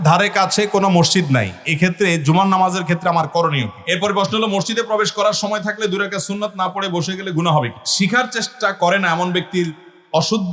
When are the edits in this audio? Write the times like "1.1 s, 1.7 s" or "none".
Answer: 3.8 s, 7.8 s